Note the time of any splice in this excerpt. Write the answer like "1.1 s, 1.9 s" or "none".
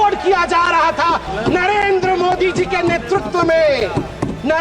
1.3 s